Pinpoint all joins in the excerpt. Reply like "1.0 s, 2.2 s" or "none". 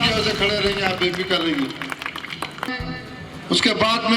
2.7 s